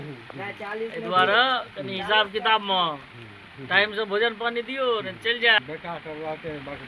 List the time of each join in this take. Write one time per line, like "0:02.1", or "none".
0:05.6

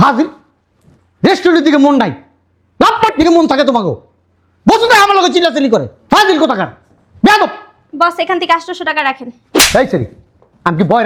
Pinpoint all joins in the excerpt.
none

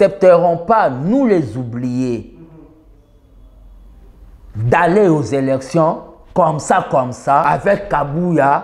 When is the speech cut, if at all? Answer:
0:07.4

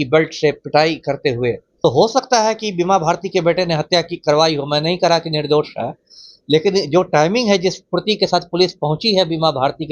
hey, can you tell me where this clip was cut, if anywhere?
0:01.7

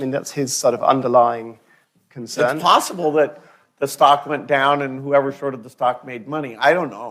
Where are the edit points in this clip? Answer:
none

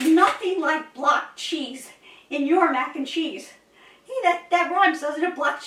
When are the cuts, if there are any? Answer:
none

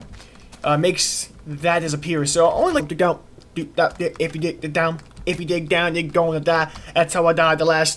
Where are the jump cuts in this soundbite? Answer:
none

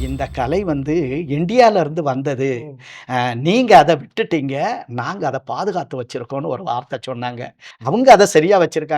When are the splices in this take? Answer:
0:07.6

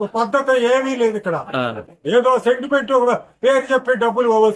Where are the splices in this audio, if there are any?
none

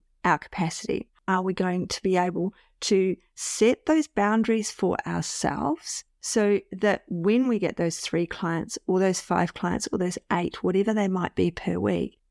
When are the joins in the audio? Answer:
0:01.1

